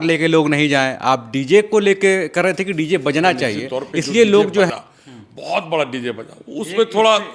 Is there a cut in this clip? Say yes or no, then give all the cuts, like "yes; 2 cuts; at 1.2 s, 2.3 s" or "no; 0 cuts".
yes; 1 cut; at 4.7 s